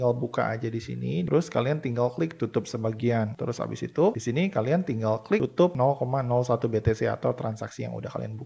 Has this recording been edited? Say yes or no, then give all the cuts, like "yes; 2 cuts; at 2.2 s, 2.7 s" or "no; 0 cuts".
yes; 2 cuts; at 1.3 s, 3.4 s